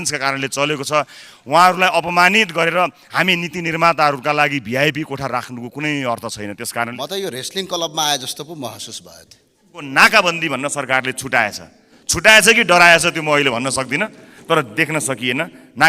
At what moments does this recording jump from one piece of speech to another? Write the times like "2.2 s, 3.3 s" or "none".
6.9 s, 9.9 s